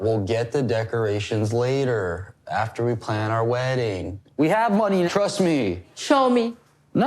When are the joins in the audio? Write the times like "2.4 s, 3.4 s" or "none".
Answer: 4.2 s, 5.9 s